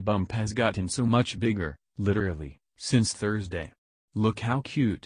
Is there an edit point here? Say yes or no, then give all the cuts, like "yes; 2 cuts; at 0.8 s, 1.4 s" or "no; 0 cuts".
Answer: no; 0 cuts